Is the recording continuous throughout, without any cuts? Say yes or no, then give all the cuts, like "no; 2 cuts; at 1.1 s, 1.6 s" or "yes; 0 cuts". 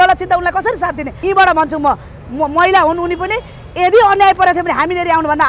no; 1 cut; at 1.1 s